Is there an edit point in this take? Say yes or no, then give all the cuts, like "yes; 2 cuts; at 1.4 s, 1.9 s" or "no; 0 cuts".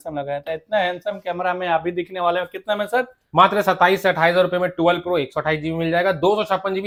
no; 0 cuts